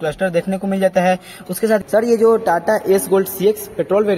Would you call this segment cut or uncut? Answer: cut